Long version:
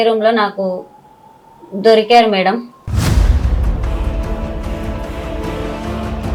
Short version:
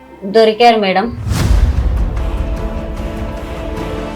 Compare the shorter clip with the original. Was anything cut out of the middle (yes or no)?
yes